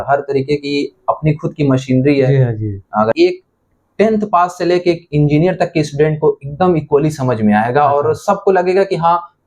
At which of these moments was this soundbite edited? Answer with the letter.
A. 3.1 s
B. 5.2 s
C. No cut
A